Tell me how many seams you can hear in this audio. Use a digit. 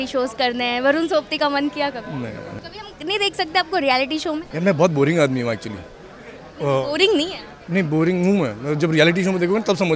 2